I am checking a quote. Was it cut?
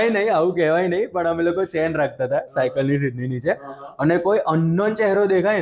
no; 0 cuts

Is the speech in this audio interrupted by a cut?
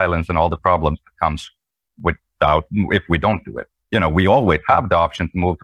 no; 0 cuts

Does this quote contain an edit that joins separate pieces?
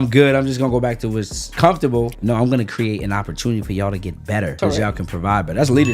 yes; 3 cuts; at 1.5 s, 2.2 s, 4.5 s

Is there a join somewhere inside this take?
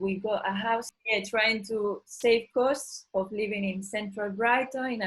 yes; 1 cut; at 0.9 s

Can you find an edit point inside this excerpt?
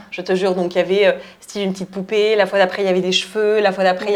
no; 0 cuts

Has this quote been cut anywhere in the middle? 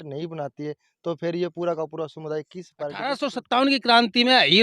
yes; 1 cut; at 3.1 s

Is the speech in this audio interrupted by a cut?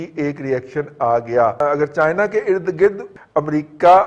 yes; 2 cuts; at 1.6 s, 3.0 s

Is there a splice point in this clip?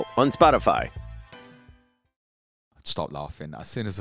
yes; 1 cut; at 2.7 s

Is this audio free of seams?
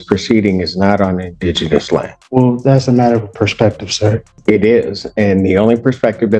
no; 2 cuts; at 2.2 s, 4.3 s

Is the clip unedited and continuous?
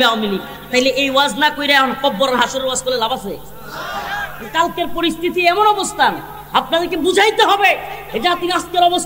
yes; 0 cuts

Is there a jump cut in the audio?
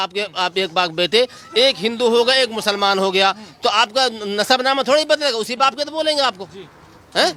no; 0 cuts

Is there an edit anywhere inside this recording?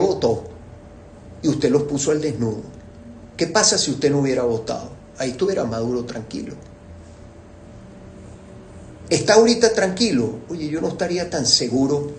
no; 0 cuts

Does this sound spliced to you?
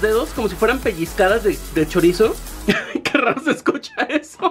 no; 0 cuts

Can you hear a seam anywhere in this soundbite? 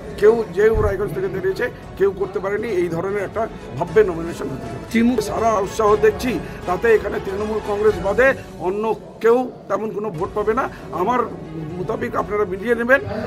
yes; 1 cut; at 5.2 s

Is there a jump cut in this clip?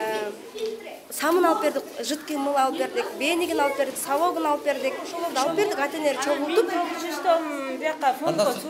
yes; 1 cut; at 5.2 s

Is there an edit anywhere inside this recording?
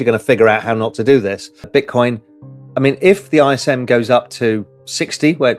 yes; 1 cut; at 1.7 s

